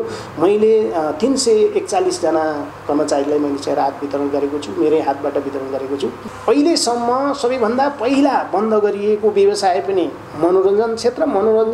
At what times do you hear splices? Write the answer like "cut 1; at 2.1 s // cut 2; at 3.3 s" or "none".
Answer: cut 1; at 6.3 s